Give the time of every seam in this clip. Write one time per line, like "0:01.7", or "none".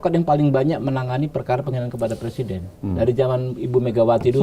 none